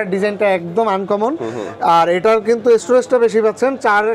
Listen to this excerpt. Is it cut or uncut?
uncut